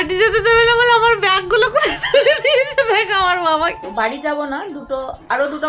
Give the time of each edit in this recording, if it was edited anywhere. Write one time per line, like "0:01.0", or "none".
0:03.8

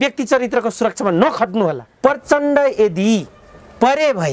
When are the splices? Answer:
0:01.9

